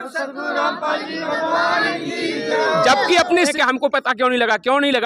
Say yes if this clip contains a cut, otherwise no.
yes